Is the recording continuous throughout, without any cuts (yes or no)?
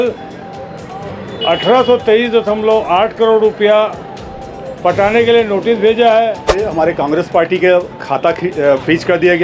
no